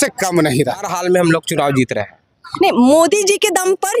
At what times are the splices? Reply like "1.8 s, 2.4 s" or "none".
0.9 s